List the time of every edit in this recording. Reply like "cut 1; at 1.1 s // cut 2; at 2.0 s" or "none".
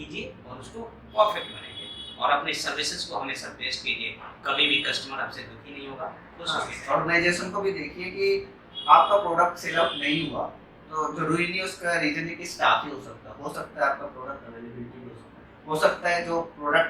none